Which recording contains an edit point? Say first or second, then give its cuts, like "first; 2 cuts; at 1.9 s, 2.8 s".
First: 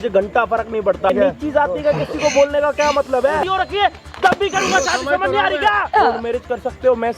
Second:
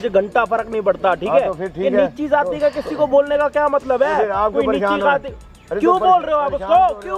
first; 3 cuts; at 1.1 s, 3.4 s, 5.8 s